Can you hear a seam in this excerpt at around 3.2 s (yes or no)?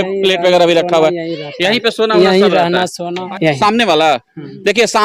yes